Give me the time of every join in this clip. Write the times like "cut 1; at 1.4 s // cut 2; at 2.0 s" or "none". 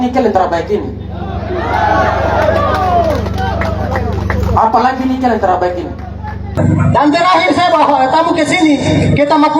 cut 1; at 6.6 s

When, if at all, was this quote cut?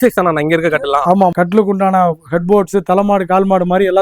cut 1; at 1.3 s

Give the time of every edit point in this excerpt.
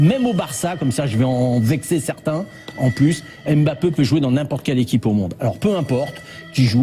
cut 1; at 5.4 s

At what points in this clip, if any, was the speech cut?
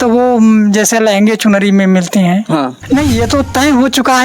cut 1; at 2.8 s

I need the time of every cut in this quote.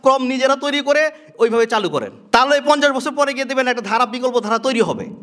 none

